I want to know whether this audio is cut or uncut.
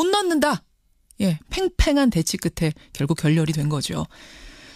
uncut